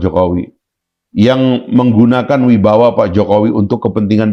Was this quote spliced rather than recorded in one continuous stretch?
no; 0 cuts

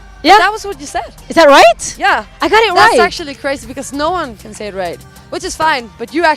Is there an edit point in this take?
yes; 1 cut; at 3.8 s

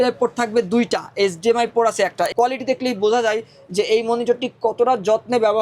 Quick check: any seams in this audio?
yes; 1 cut; at 2.3 s

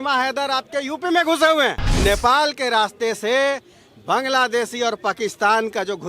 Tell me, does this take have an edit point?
yes; 1 cut; at 2.0 s

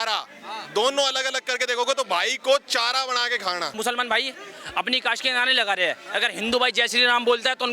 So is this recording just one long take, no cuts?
no; 1 cut; at 3.7 s

